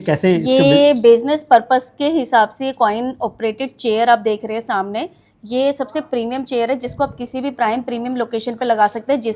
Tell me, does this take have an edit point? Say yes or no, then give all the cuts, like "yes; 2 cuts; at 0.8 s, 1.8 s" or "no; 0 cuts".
no; 0 cuts